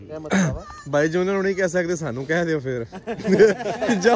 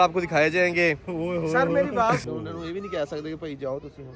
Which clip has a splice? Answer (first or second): second